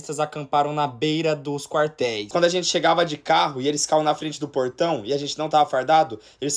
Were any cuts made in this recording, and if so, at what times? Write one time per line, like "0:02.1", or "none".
0:02.2